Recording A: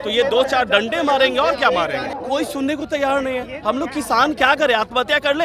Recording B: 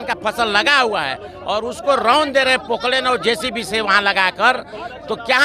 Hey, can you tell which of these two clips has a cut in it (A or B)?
A